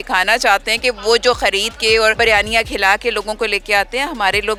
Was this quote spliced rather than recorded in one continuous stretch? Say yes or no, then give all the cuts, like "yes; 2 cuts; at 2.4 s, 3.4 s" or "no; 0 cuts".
no; 0 cuts